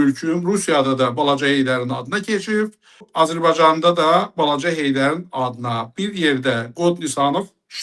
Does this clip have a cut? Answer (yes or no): yes